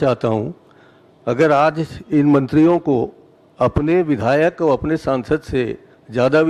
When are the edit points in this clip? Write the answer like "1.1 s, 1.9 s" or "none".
none